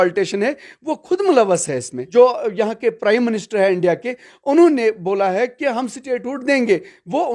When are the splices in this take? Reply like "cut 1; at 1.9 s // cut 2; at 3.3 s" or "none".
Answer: cut 1; at 2.0 s

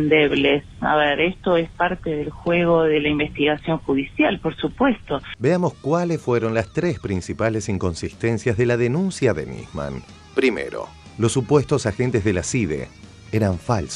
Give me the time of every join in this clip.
none

